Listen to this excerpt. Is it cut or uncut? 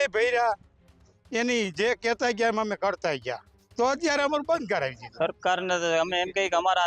cut